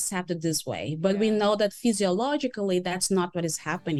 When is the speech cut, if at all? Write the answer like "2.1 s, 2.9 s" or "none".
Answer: none